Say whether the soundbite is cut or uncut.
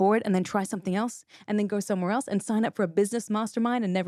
uncut